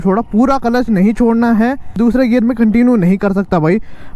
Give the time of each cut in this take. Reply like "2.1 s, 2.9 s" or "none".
2.0 s